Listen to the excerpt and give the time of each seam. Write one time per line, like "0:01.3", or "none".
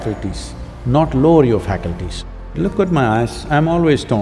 0:02.5